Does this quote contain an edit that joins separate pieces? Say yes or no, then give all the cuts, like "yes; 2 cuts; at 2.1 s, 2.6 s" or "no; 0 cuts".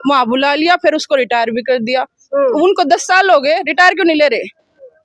no; 0 cuts